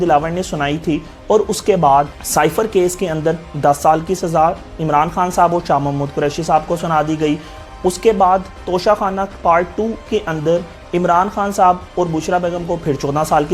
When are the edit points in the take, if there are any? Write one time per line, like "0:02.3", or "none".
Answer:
none